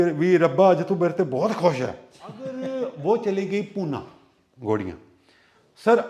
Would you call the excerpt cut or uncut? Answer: cut